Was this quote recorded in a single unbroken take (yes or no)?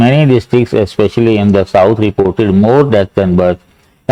yes